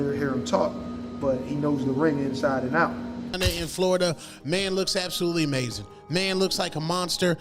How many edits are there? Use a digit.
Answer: 1